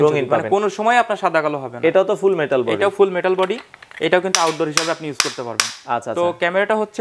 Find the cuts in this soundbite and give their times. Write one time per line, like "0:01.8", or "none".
none